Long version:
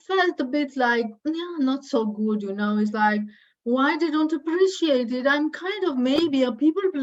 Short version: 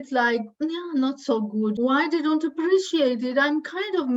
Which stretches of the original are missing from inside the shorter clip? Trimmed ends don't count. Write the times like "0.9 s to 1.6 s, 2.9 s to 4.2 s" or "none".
2.4 s to 3.6 s